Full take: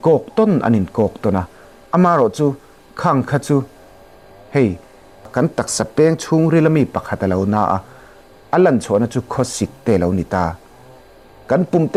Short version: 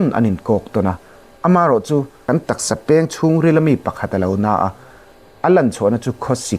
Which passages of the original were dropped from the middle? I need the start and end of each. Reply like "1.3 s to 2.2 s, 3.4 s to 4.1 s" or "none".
2.6 s to 5.2 s